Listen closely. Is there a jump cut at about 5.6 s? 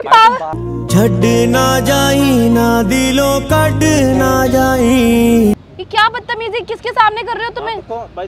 yes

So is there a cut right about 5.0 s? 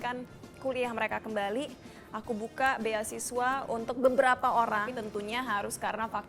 yes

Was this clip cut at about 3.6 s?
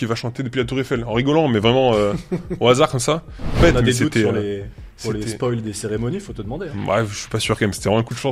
yes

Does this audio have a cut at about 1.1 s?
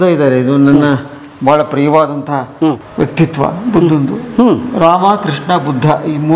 no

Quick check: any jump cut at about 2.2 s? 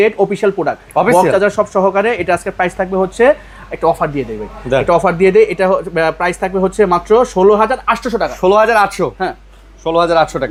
no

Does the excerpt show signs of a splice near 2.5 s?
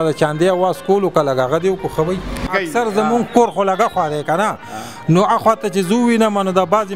yes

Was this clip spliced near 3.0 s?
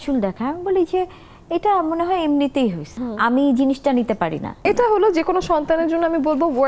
yes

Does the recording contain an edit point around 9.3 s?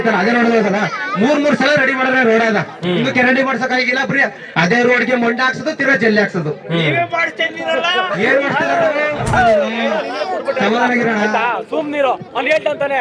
yes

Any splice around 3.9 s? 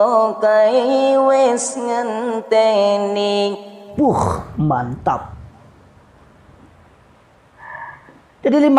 yes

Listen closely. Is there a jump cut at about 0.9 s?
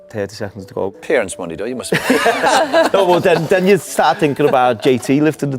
yes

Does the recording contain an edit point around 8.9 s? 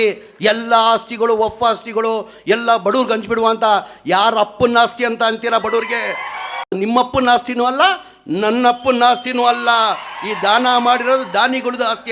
no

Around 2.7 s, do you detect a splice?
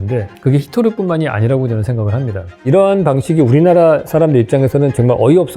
yes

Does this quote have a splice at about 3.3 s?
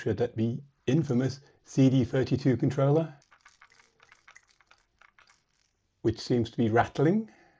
yes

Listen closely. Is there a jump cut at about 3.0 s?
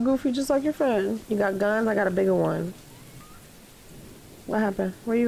no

